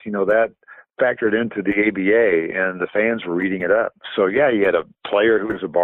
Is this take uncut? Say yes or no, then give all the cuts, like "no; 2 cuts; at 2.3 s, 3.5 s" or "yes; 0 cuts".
yes; 0 cuts